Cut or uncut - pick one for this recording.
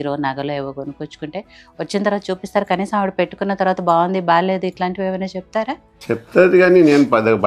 uncut